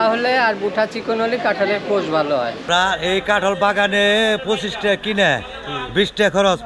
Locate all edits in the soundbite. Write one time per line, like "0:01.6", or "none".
0:02.6